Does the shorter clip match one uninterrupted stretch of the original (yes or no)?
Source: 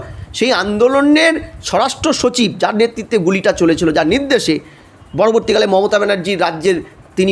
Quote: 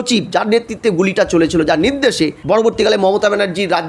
no